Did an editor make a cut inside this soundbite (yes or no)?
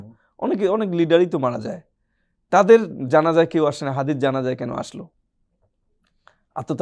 no